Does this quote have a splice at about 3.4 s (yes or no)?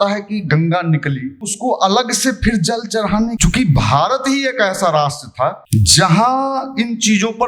yes